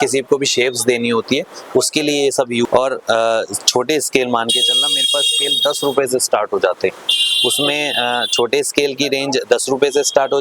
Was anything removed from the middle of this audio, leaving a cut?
yes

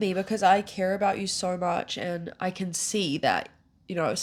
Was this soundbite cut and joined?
no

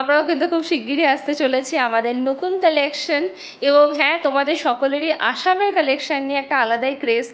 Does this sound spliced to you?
no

